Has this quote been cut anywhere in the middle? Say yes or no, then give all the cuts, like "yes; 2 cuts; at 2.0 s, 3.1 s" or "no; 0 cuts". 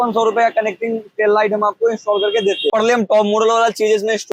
yes; 1 cut; at 2.7 s